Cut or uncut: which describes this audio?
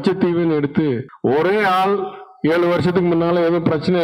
cut